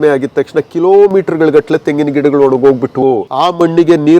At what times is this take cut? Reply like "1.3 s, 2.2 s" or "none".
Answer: 3.0 s